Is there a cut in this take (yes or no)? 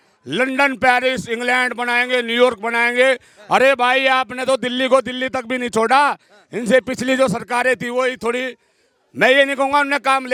no